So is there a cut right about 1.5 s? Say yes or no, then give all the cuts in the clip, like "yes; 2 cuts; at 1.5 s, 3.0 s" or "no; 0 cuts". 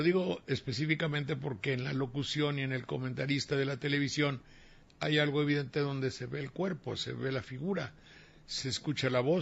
yes; 1 cut; at 1.5 s